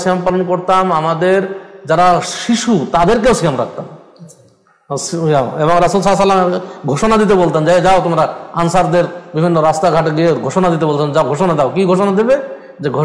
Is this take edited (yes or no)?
no